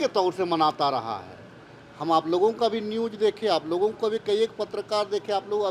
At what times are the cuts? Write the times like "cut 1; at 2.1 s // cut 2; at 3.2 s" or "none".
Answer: none